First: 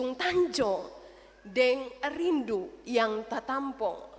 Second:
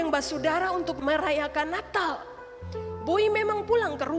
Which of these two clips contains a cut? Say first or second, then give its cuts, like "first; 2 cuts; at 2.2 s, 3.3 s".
second; 1 cut; at 1.0 s